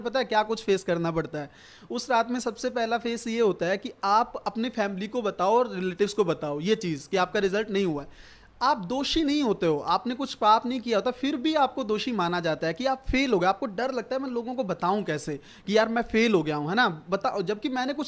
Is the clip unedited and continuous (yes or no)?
yes